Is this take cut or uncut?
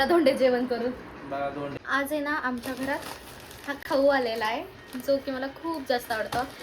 cut